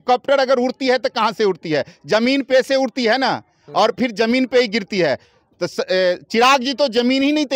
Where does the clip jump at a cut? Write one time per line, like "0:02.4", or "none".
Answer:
none